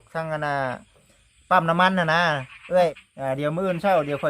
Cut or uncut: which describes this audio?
cut